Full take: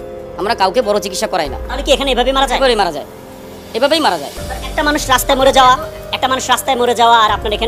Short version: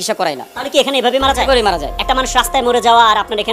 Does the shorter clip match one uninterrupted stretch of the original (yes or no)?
no